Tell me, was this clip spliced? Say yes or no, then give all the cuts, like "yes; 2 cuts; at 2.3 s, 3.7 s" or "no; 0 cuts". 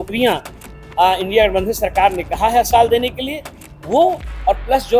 no; 0 cuts